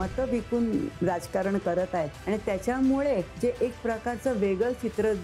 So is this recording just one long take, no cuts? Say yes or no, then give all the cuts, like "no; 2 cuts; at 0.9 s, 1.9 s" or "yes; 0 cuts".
no; 3 cuts; at 0.9 s, 2.2 s, 3.3 s